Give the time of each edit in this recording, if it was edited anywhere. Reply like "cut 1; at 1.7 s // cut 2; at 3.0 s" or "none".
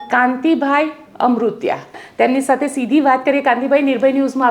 cut 1; at 2.0 s